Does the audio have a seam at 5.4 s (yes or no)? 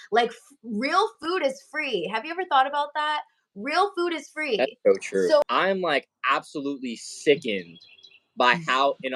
yes